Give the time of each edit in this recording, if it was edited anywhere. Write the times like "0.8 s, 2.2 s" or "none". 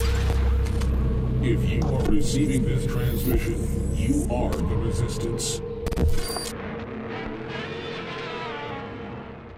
none